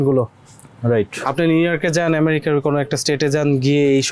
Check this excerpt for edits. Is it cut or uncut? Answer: uncut